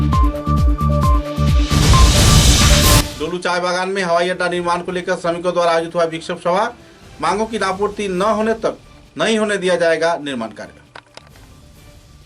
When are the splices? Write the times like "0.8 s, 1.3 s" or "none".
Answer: 3.0 s

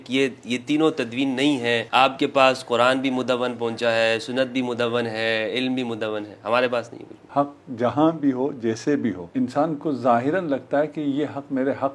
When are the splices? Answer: 1.8 s, 7.3 s, 9.2 s

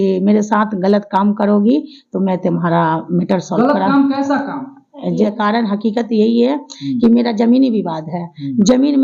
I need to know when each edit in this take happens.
5.3 s

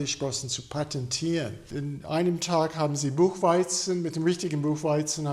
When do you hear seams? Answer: 1.6 s

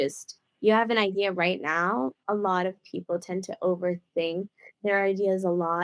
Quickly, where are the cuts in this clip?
2.2 s

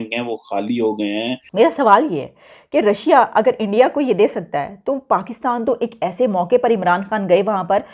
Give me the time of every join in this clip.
1.4 s

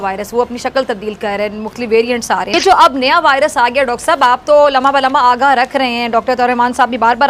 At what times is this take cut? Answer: none

